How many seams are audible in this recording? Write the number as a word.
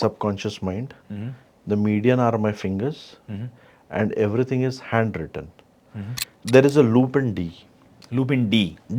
one